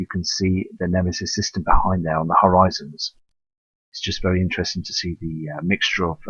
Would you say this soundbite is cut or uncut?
cut